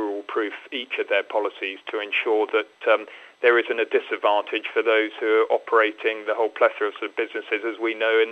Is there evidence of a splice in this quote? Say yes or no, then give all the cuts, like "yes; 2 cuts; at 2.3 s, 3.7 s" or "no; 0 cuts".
no; 0 cuts